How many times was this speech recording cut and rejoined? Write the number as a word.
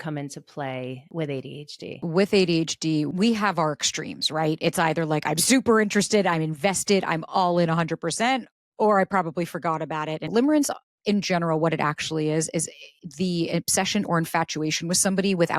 four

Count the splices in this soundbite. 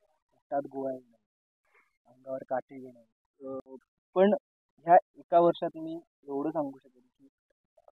one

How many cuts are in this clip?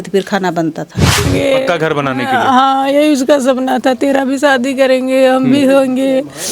one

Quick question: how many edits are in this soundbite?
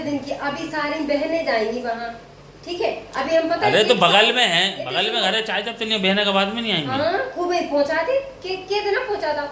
zero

